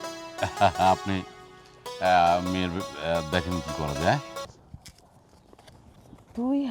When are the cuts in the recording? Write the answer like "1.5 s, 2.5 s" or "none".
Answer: 4.6 s